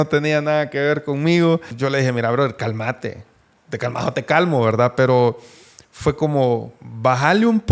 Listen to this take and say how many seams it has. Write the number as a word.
one